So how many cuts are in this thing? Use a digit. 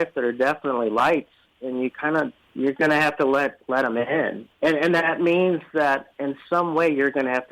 2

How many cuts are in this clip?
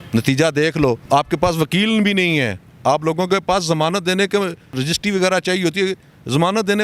2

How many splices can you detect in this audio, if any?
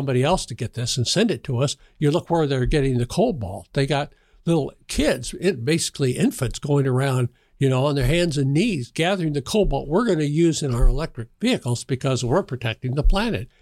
0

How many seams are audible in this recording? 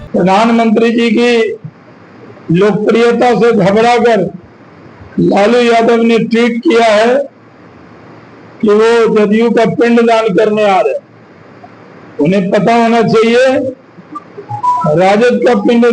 0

